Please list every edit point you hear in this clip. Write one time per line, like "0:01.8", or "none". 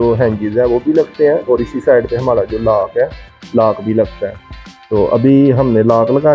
none